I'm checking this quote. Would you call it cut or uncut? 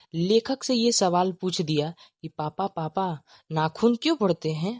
uncut